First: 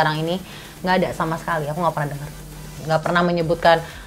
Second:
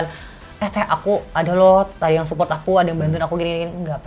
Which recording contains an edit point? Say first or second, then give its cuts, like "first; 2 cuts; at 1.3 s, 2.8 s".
first; 1 cut; at 2.7 s